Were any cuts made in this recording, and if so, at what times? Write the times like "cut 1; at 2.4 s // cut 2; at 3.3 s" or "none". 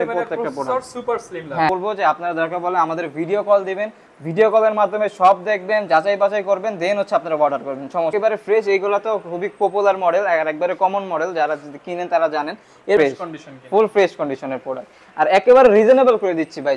cut 1; at 1.7 s // cut 2; at 8.1 s // cut 3; at 13.0 s